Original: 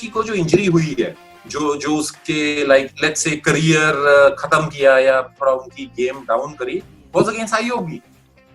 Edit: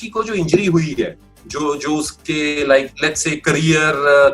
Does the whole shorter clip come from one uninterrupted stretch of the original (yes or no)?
yes